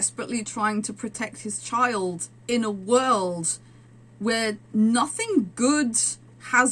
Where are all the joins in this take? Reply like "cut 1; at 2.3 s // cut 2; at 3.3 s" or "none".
none